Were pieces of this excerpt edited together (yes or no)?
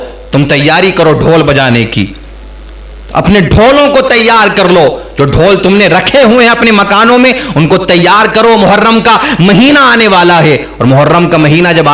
no